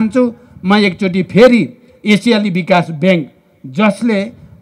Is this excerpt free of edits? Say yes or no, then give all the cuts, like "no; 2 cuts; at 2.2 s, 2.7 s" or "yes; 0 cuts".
yes; 0 cuts